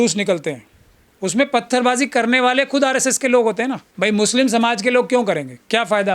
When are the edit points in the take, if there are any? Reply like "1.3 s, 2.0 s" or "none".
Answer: 3.9 s